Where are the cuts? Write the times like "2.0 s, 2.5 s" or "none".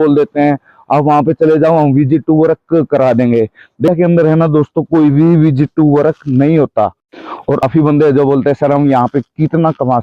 3.9 s, 7.6 s